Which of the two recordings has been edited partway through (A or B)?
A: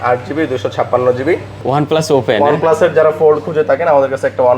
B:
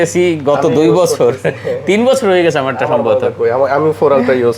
A